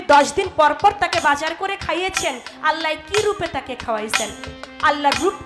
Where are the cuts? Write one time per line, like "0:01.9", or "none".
none

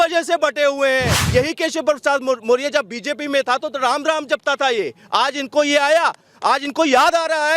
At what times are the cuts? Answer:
0:01.2

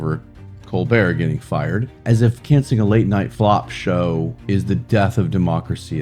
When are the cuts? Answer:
0:01.9
0:03.3
0:04.4

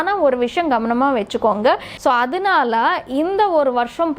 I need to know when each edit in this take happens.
0:01.9

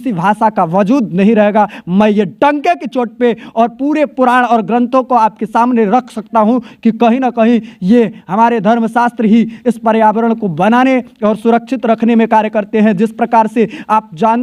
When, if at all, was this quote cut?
none

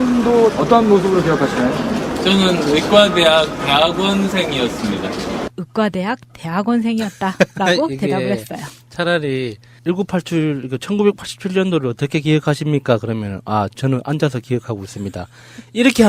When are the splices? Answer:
none

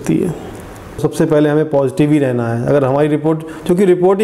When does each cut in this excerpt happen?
0:01.0

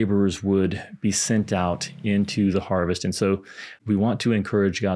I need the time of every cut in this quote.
0:03.8

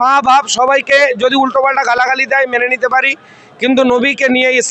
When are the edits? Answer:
none

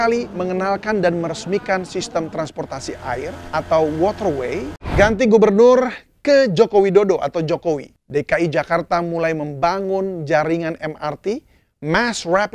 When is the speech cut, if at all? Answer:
0:03.4
0:04.9
0:07.9

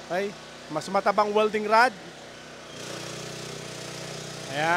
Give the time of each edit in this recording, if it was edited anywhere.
0:02.3

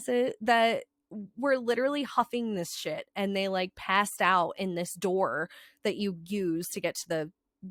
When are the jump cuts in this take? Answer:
none

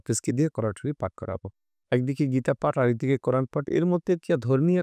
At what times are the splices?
none

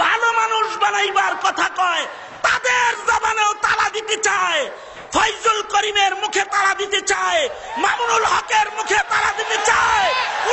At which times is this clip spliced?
none

